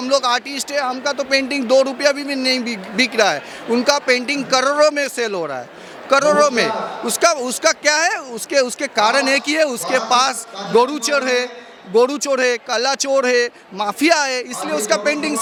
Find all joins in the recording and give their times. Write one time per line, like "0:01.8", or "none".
none